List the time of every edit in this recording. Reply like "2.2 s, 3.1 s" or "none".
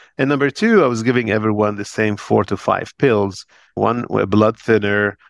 3.8 s